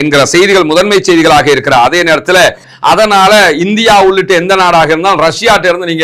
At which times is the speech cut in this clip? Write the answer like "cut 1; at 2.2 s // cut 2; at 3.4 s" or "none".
cut 1; at 2.6 s